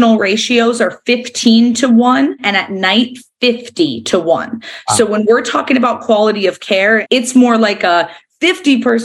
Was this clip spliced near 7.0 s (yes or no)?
yes